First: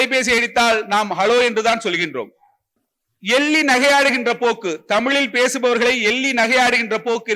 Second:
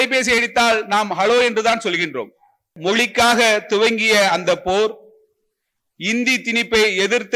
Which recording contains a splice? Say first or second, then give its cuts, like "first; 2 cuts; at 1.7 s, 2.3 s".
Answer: second; 1 cut; at 2.7 s